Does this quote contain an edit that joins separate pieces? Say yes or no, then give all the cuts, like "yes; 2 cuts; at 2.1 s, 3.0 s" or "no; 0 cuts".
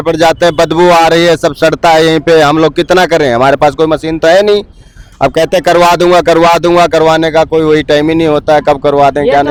no; 0 cuts